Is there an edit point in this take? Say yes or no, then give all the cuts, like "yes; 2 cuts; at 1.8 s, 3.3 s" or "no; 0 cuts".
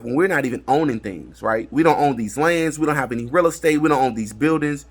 no; 0 cuts